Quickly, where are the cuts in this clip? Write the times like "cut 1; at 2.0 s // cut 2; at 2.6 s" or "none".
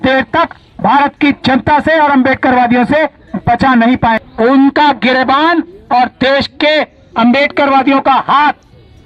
cut 1; at 4.2 s